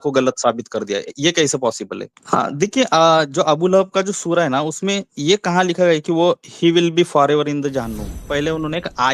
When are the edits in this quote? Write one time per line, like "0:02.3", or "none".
0:02.1
0:08.2